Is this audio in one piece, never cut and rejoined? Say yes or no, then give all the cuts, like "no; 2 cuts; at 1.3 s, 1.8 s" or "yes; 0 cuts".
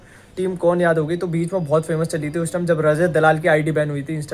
yes; 0 cuts